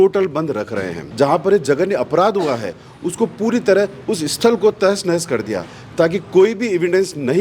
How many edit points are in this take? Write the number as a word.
one